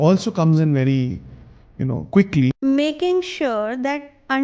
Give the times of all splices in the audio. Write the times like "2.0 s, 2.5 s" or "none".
2.5 s